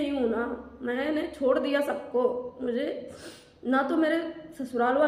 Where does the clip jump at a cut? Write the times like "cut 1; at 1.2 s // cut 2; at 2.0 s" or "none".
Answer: none